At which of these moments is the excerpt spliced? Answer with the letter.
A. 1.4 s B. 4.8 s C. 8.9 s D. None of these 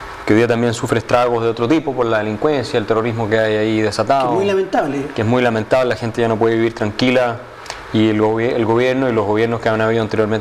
B